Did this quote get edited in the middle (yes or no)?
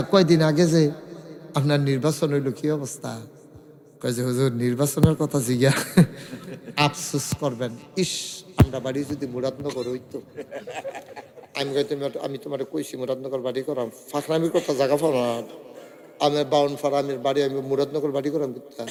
no